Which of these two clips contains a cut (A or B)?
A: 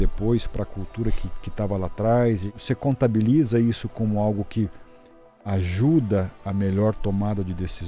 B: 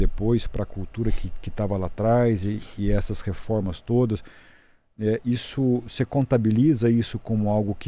A